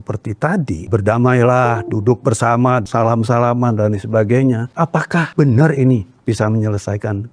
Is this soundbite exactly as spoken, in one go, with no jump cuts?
no; 3 cuts; at 0.9 s, 2.8 s, 5.1 s

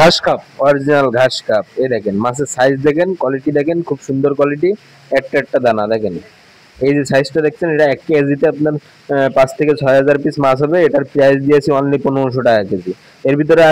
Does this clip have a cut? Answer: no; 0 cuts

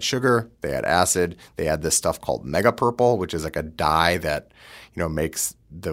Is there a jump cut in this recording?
no; 0 cuts

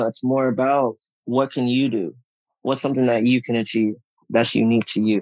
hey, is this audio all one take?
no; 1 cut; at 4.2 s

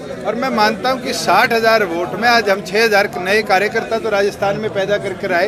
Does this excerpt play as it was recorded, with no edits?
yes; 0 cuts

